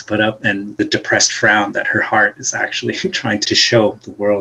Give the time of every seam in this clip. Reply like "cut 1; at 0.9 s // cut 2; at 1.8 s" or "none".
cut 1; at 0.8 s // cut 2; at 3.4 s